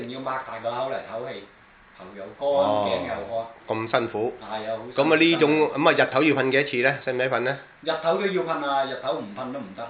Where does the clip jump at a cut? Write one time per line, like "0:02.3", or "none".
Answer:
0:08.8